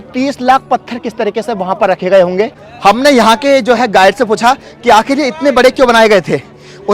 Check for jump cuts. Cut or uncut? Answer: uncut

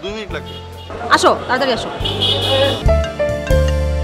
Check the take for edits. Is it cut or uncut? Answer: cut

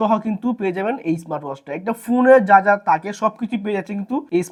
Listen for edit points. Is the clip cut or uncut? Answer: uncut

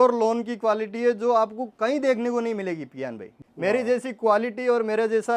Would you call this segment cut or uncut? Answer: cut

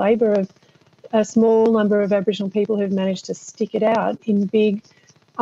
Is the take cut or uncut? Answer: uncut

